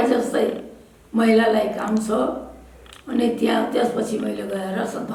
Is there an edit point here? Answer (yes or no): no